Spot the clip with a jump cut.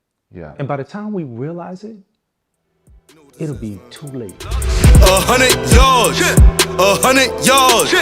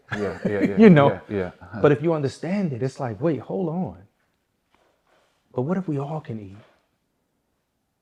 first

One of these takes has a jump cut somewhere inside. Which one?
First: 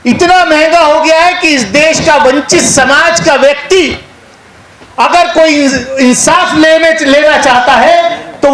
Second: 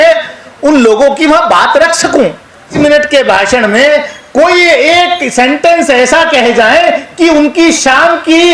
second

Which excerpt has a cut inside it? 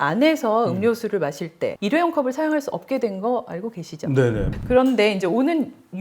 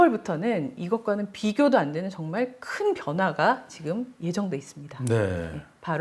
first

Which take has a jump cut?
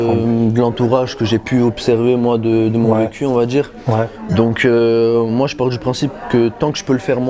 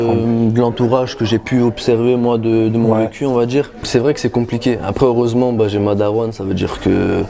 second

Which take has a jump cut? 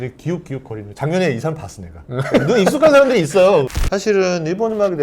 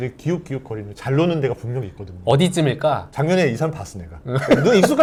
first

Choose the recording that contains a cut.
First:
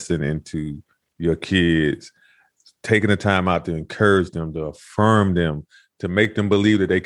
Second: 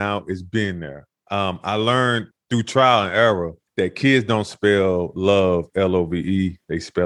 second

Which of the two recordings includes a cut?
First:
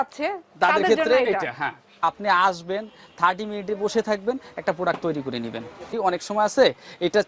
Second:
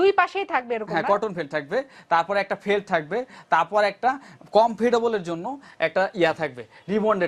first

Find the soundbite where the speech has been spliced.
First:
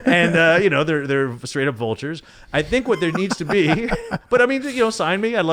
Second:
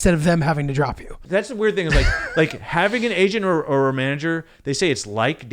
second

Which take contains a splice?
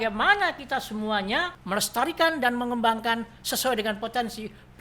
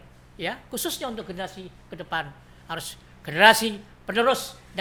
first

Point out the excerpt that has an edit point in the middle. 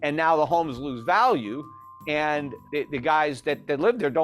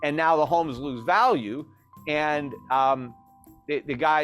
first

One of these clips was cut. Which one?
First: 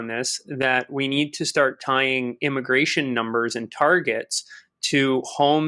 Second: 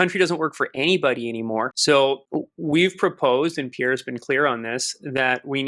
second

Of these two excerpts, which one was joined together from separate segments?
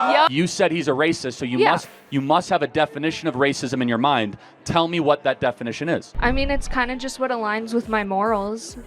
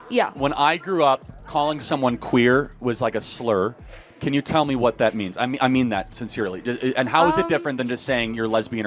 first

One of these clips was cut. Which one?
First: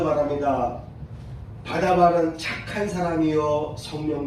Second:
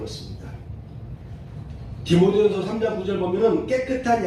second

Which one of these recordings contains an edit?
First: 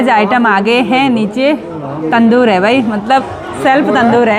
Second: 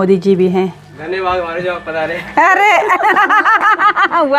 second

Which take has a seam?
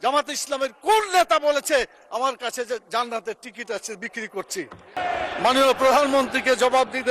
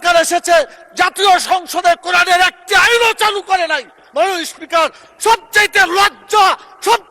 first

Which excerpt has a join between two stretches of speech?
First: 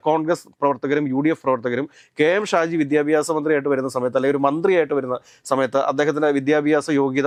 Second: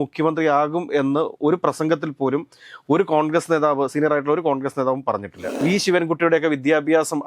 second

